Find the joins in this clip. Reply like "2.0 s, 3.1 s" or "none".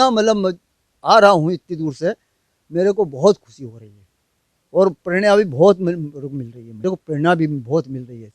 6.8 s

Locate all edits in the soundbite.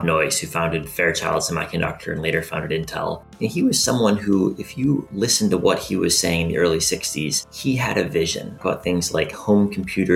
3.3 s, 5.1 s, 7.4 s, 8.6 s

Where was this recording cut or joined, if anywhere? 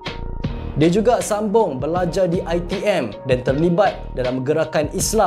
none

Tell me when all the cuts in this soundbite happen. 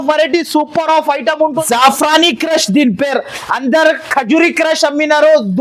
1.6 s

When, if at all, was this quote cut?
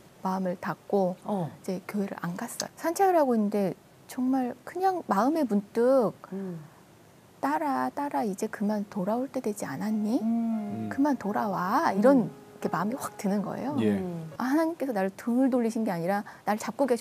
2.6 s, 14.3 s

